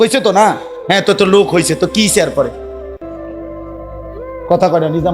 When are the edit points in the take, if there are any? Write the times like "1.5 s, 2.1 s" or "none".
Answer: 2.7 s, 4.1 s

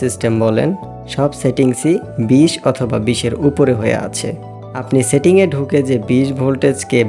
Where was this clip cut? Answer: none

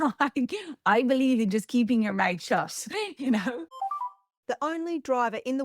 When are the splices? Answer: 4.2 s

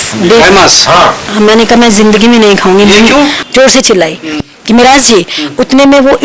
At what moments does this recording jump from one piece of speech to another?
3.4 s

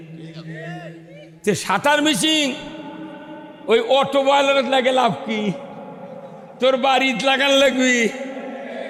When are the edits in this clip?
none

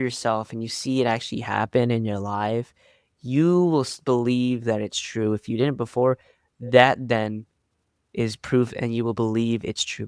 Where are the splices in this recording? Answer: none

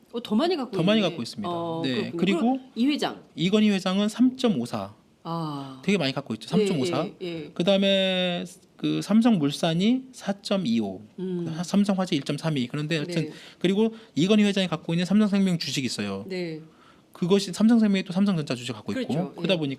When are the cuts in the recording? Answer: 11.1 s

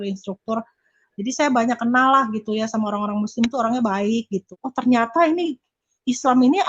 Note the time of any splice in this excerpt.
4.4 s

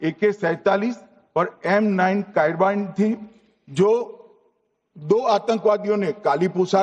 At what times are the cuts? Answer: 2.1 s

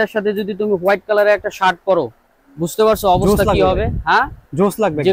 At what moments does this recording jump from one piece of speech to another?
none

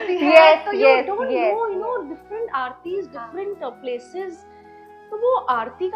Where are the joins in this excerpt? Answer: none

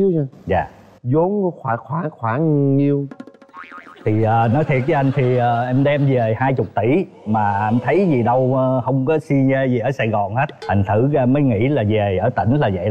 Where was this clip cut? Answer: none

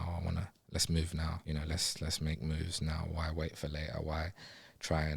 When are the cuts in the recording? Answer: 1.4 s

